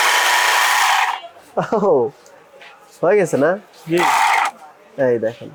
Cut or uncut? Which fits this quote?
uncut